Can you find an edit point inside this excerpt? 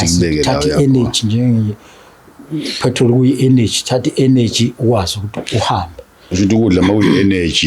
no; 0 cuts

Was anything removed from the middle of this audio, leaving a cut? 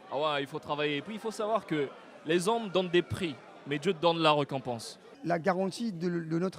yes; 1 cut; at 5.1 s

